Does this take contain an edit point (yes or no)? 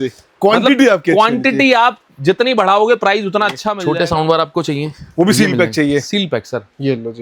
yes